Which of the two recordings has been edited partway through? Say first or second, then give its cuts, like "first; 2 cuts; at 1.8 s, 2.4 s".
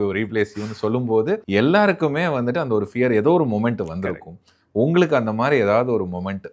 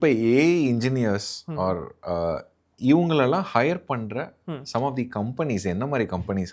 first; 1 cut; at 1.4 s